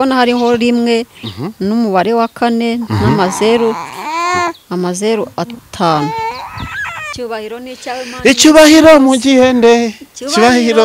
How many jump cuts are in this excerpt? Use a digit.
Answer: 1